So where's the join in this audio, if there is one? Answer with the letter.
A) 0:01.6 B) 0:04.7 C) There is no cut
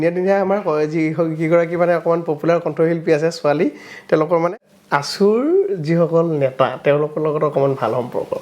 B